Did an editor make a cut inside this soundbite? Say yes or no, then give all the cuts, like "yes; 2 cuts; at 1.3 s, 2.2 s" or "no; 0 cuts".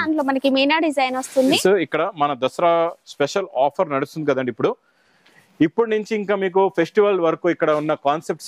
yes; 1 cut; at 1.6 s